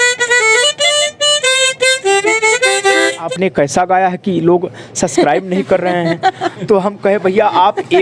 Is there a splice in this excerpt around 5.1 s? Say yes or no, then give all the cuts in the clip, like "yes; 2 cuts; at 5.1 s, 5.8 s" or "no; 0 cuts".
no; 1 cut; at 3.3 s